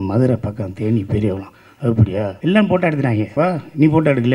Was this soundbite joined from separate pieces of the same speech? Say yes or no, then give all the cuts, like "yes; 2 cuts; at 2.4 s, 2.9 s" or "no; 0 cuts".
yes; 2 cuts; at 2.3 s, 3.3 s